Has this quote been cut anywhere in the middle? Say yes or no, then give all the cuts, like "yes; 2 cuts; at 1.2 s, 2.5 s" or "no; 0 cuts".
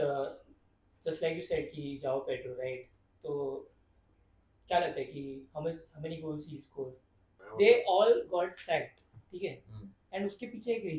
yes; 1 cut; at 7.4 s